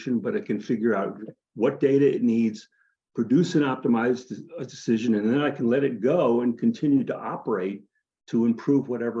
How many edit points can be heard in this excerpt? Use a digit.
0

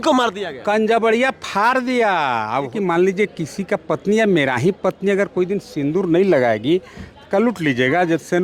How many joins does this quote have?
1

